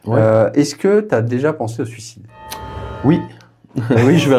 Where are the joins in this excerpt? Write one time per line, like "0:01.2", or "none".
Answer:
none